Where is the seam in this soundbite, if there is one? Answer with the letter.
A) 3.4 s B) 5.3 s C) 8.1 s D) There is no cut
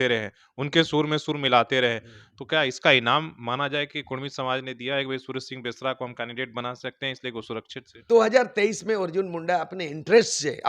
C